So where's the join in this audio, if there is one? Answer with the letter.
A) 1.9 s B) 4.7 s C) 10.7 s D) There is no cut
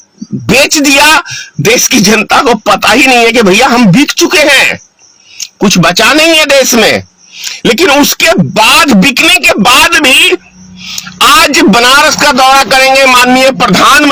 D